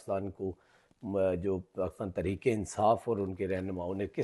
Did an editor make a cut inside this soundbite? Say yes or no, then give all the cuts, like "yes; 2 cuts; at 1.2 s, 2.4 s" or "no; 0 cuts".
no; 0 cuts